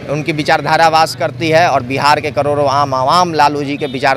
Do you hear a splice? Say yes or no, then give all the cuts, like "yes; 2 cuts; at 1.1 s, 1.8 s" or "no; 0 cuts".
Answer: no; 0 cuts